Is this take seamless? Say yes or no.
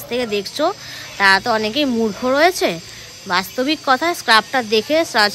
yes